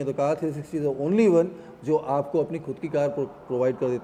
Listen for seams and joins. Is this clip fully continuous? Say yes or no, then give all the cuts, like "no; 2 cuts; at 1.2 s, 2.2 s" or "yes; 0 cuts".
yes; 0 cuts